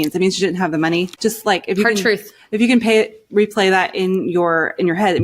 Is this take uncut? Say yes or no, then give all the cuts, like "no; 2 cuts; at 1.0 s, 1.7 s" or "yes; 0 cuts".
no; 1 cut; at 1.1 s